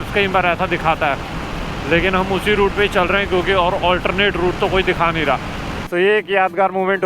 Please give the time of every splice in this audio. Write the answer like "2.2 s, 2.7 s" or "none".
5.8 s